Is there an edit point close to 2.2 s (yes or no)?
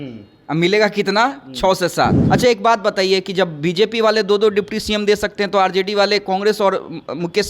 yes